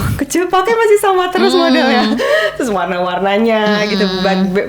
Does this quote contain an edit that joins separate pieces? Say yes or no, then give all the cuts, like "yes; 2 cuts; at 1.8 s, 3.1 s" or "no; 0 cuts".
no; 0 cuts